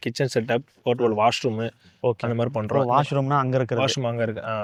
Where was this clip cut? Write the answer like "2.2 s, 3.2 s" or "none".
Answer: none